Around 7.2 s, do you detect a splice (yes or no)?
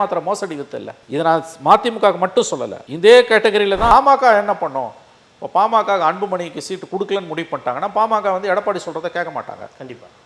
no